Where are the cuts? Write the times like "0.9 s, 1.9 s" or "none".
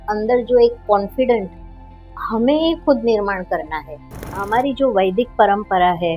4.4 s